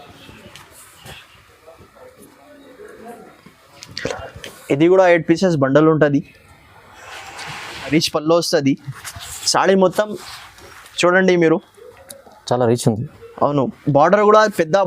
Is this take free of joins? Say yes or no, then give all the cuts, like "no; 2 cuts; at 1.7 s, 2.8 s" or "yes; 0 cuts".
no; 1 cut; at 7.9 s